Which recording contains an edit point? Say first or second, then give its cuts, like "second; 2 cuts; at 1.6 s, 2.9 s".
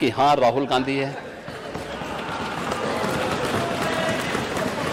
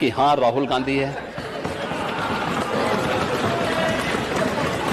second; 2 cuts; at 1.3 s, 3.7 s